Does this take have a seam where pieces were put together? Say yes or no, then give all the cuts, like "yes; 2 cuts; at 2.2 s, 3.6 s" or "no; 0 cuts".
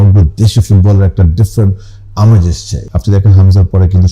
yes; 1 cut; at 2.8 s